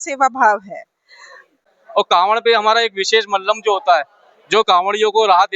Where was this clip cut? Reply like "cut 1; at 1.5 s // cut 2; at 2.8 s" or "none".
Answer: cut 1; at 1.5 s